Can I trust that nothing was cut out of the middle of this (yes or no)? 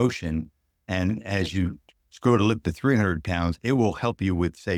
yes